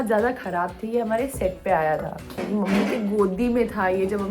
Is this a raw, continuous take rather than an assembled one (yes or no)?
no